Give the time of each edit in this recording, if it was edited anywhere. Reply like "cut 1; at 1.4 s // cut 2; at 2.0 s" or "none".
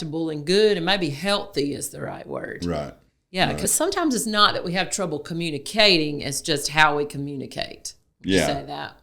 cut 1; at 3.6 s